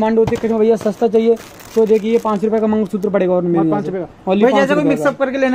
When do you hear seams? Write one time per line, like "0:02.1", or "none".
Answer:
none